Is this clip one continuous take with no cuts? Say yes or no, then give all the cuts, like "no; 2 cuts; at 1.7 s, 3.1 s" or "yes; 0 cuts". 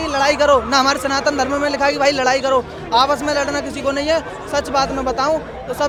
yes; 0 cuts